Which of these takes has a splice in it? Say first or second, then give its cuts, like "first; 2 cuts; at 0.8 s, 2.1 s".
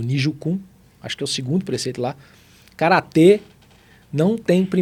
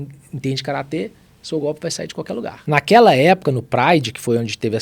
second; 1 cut; at 2.5 s